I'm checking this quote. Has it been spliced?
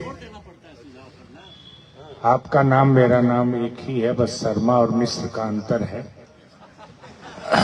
no; 0 cuts

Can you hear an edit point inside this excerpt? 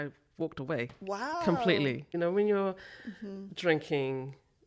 yes; 1 cut; at 2.0 s

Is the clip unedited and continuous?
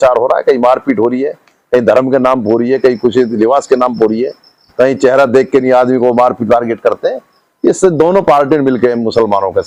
yes; 0 cuts

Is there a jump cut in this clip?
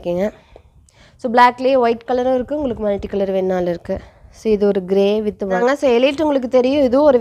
yes; 1 cut; at 5.6 s

